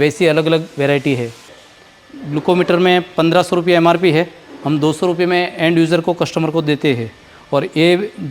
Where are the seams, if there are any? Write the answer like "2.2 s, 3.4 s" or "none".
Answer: 1.6 s